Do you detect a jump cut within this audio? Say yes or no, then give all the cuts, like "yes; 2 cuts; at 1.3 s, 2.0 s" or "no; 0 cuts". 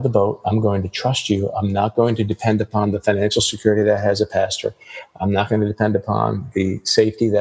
no; 0 cuts